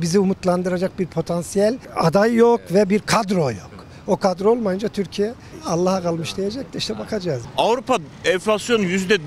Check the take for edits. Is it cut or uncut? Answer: cut